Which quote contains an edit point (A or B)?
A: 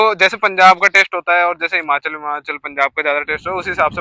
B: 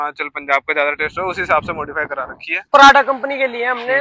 B